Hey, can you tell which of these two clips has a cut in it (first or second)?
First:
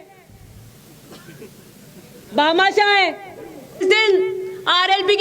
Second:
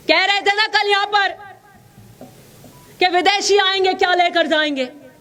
first